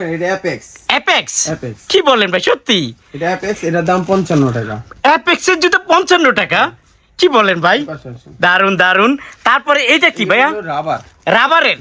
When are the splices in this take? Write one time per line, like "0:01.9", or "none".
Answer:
none